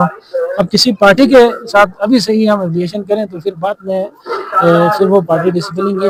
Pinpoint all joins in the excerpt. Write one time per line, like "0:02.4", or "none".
none

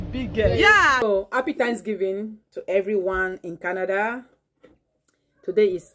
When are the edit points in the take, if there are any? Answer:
0:01.0

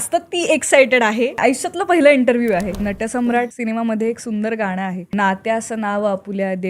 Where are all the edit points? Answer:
0:01.3
0:03.2
0:05.1

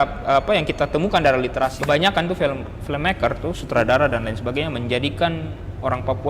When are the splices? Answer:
0:01.8

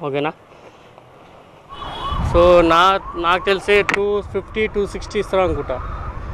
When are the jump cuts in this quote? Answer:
none

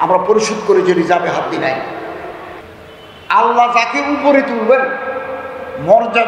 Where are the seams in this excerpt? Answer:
0:02.6

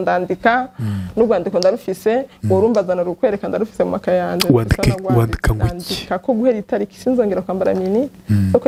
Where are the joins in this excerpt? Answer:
none

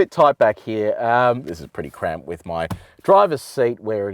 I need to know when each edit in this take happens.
0:01.4

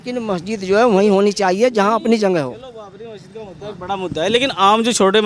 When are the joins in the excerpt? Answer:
none

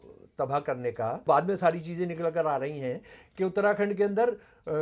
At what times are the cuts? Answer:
0:01.2

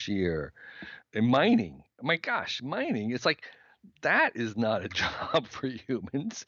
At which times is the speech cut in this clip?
0:01.0

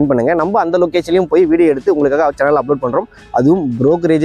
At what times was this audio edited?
none

